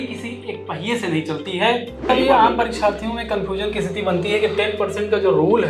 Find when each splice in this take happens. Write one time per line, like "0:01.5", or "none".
0:02.1